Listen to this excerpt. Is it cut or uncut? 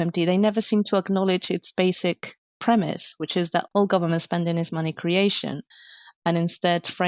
uncut